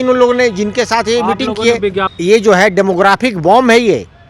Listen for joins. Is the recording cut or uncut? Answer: cut